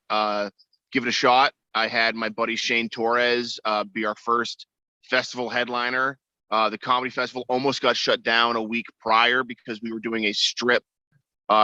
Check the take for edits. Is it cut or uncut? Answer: uncut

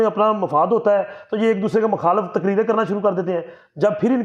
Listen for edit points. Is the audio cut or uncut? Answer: uncut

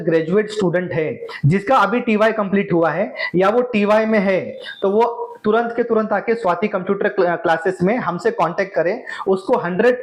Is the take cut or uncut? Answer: uncut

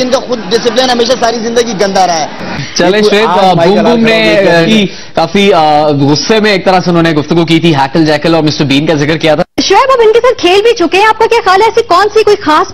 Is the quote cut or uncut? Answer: uncut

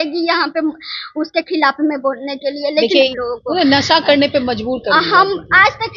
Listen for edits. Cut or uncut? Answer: cut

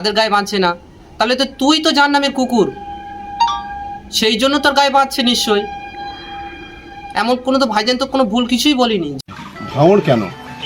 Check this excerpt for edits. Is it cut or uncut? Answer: uncut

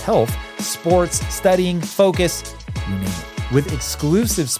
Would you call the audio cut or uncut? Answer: uncut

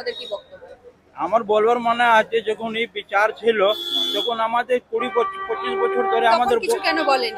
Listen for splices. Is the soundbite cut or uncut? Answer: uncut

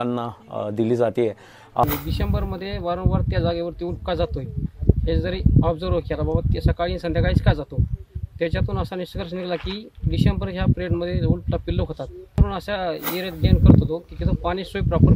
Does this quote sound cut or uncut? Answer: cut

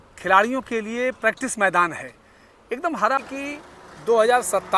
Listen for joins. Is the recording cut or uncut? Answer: cut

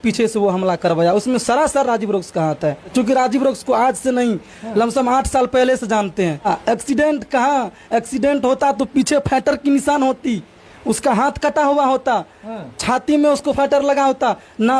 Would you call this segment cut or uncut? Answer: cut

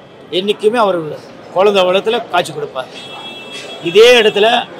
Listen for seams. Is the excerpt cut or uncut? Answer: uncut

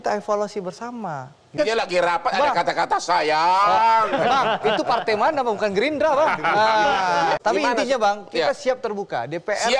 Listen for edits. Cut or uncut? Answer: cut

